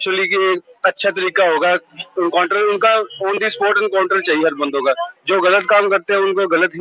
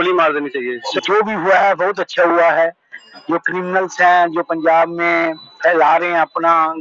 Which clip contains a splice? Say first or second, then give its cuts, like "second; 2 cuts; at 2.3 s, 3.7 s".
second; 1 cut; at 0.9 s